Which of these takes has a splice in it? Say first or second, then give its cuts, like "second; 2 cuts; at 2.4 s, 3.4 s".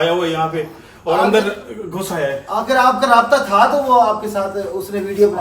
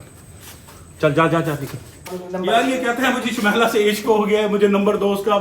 second; 1 cut; at 2.2 s